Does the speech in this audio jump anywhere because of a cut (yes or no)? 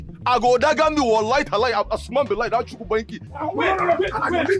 yes